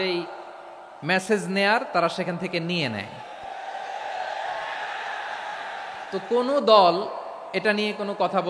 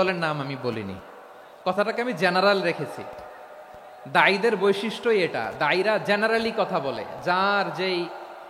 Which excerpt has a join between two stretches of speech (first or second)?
first